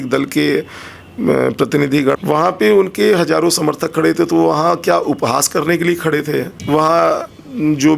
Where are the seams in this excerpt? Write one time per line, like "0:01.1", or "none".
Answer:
0:02.2
0:06.5